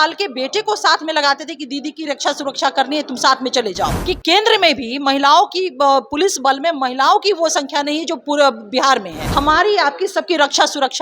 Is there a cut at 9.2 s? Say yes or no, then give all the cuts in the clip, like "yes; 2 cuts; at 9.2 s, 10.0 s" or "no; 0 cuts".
yes; 2 cuts; at 4.0 s, 9.2 s